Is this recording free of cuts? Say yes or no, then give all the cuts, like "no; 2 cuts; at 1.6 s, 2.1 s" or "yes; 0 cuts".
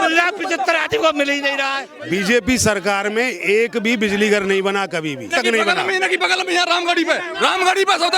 no; 2 cuts; at 1.9 s, 5.3 s